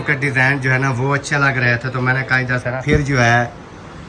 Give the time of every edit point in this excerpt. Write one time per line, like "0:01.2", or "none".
0:02.8